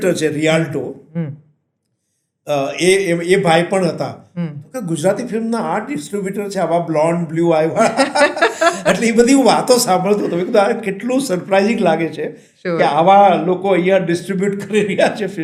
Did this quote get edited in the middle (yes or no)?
no